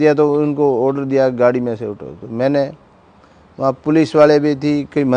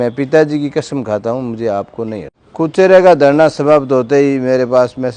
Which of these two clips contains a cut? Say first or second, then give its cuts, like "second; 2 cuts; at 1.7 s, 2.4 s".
second; 1 cut; at 2.4 s